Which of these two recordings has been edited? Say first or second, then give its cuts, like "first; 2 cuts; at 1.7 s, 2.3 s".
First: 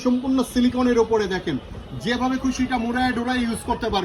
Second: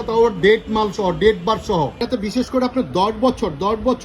second; 1 cut; at 2.0 s